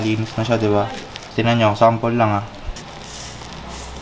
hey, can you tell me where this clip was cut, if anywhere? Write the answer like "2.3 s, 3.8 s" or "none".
1.1 s, 2.8 s